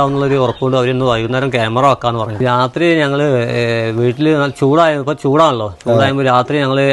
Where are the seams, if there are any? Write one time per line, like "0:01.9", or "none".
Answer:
0:02.4